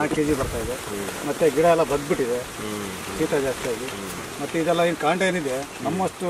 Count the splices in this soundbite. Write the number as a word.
zero